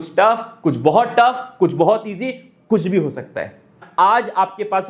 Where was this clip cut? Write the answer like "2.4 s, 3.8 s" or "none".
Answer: 3.8 s

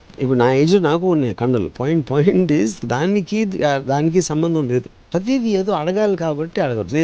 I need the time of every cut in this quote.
5.1 s

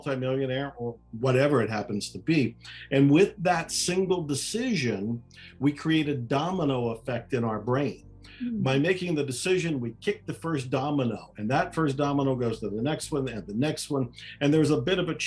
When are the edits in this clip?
none

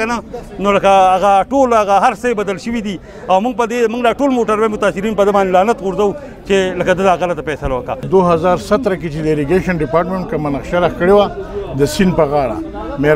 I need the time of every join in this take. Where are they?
none

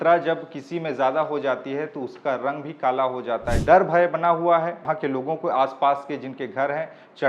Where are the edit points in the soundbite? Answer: 3.6 s, 4.9 s

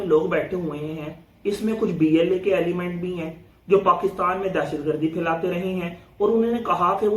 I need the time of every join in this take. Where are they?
none

